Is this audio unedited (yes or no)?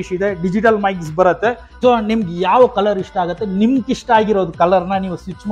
no